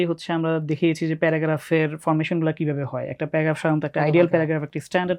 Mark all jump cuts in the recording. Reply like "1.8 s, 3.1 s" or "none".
none